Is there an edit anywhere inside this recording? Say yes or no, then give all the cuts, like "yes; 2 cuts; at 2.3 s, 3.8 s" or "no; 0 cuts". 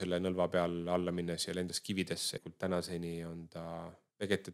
yes; 1 cut; at 2.4 s